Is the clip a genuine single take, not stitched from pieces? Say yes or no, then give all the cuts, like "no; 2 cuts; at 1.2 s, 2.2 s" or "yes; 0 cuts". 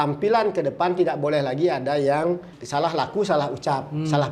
no; 1 cut; at 2.6 s